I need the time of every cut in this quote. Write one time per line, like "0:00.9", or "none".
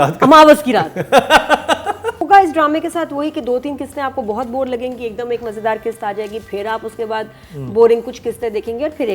0:02.2